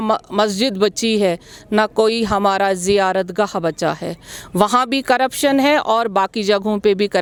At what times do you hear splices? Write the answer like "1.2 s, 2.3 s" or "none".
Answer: none